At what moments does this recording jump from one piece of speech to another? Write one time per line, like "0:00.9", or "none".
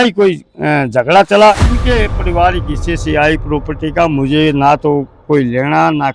0:01.7